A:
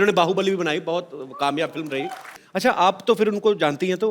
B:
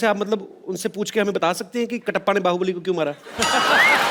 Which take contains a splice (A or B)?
A